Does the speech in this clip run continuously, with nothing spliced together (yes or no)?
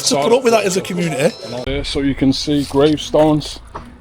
no